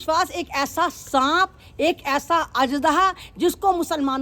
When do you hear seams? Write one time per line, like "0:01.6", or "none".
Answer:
none